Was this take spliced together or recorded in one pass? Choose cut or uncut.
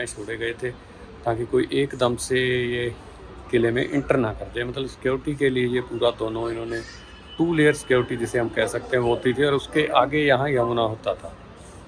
uncut